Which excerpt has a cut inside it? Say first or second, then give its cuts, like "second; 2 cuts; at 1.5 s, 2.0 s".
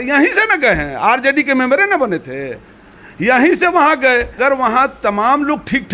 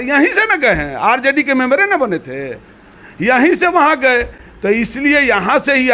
first; 1 cut; at 4.4 s